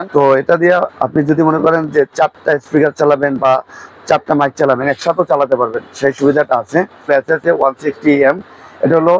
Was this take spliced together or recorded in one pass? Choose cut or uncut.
cut